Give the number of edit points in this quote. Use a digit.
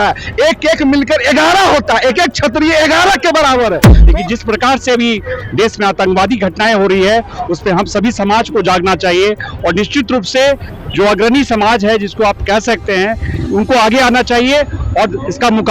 2